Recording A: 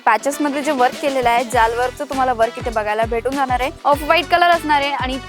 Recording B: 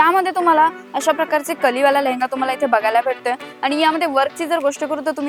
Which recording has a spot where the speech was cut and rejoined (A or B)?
A